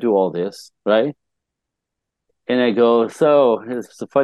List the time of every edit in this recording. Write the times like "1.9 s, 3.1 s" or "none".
none